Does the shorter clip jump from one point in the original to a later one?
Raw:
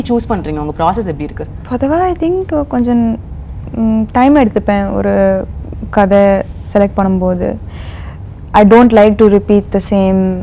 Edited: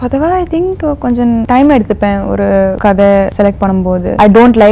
yes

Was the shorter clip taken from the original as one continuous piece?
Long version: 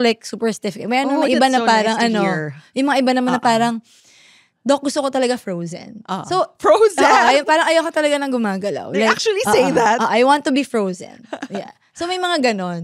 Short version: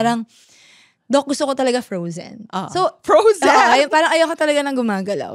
yes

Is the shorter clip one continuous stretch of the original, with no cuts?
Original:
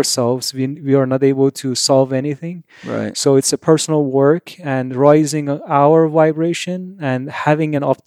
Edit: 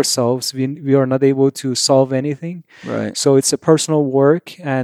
yes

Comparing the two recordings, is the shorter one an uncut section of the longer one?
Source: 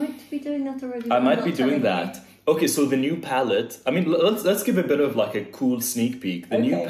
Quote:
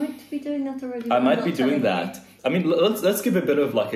no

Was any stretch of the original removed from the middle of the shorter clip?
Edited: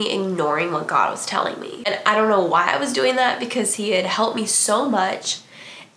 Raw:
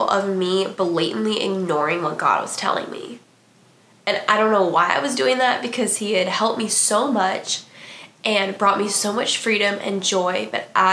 yes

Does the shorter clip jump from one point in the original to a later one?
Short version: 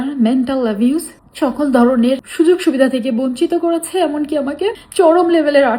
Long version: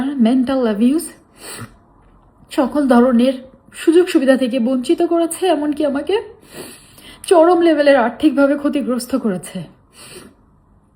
yes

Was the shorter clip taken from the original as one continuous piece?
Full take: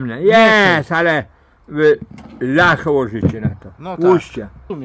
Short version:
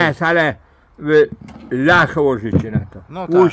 yes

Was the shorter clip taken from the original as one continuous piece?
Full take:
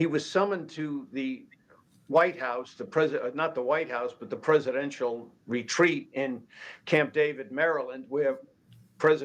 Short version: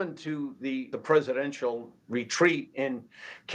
no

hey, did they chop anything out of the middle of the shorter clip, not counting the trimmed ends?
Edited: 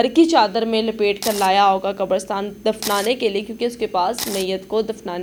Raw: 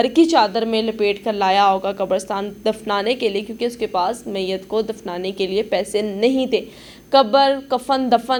no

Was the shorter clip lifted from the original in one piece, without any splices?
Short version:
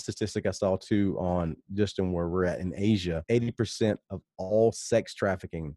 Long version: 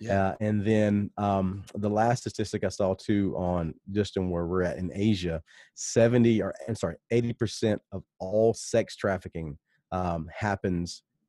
no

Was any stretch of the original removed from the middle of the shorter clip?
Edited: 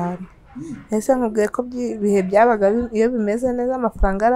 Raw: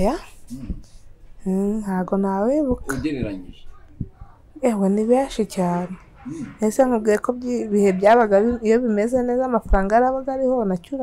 no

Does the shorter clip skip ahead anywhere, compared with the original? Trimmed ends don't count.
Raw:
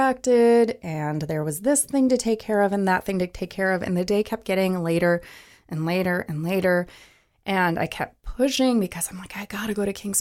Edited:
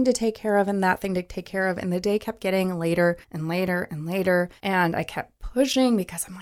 yes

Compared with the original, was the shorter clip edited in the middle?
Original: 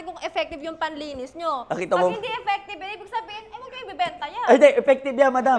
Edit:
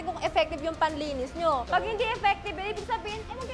yes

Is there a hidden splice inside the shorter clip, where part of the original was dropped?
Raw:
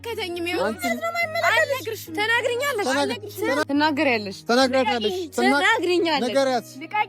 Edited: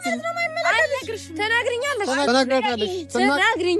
yes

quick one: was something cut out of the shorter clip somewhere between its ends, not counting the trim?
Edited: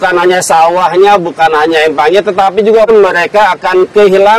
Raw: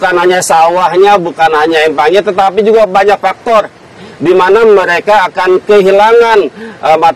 yes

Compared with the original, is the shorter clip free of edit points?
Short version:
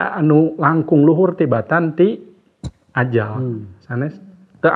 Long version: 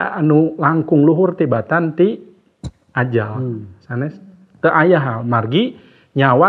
yes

